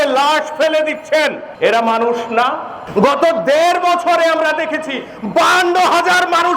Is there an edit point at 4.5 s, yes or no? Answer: no